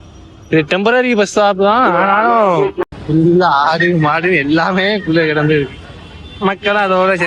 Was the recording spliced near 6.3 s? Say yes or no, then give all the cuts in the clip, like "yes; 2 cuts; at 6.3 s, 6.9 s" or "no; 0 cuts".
no; 1 cut; at 2.9 s